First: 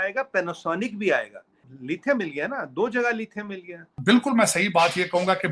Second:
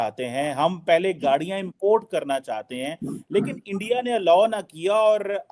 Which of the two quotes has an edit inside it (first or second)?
first